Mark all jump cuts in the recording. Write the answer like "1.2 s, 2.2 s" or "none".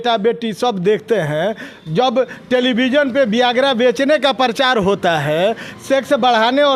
none